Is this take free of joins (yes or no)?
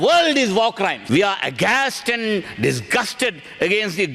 no